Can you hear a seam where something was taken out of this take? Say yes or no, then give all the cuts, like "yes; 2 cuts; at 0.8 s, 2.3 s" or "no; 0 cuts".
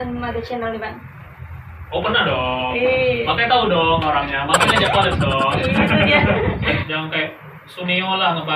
yes; 1 cut; at 6.8 s